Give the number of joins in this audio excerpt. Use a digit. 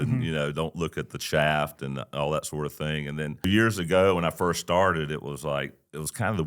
1